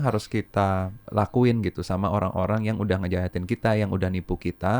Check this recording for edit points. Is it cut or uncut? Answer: cut